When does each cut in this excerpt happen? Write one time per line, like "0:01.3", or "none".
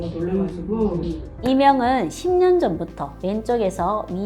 0:01.2